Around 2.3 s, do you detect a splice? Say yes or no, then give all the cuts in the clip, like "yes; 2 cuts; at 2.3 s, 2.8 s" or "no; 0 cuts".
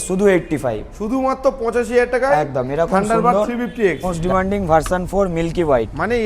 no; 1 cut; at 4.1 s